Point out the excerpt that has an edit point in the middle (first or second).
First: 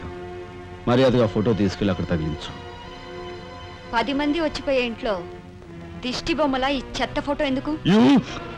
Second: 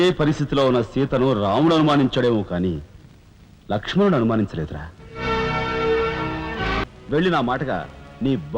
second